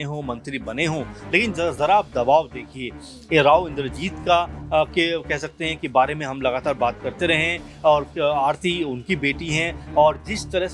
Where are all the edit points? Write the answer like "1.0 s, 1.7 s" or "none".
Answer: none